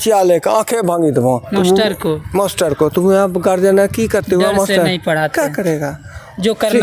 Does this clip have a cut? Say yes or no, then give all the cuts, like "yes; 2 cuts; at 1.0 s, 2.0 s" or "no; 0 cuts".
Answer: no; 0 cuts